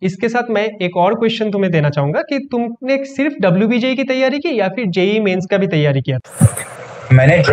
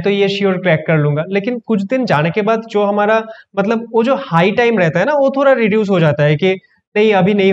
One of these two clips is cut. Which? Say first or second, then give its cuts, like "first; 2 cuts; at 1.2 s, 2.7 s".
first; 1 cut; at 6.2 s